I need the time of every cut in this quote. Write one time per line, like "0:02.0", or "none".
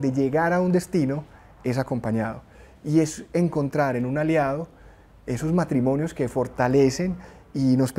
none